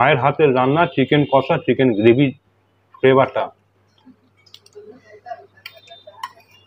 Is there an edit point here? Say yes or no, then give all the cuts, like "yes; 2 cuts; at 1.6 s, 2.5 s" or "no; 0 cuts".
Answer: no; 0 cuts